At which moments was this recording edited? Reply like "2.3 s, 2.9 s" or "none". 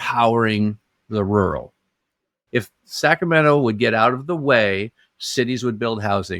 2.3 s